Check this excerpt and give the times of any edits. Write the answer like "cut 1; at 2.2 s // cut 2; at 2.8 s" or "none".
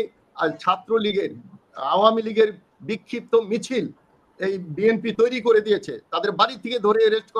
none

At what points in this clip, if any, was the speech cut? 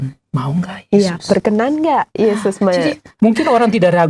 cut 1; at 3.2 s

